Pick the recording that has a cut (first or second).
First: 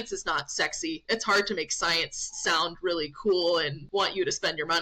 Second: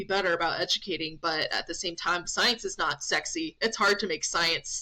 first